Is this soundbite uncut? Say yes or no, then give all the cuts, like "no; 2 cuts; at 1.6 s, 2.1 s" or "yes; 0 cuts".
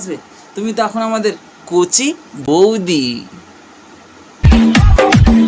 yes; 0 cuts